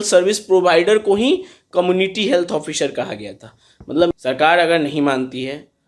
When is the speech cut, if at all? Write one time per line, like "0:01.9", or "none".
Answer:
0:04.1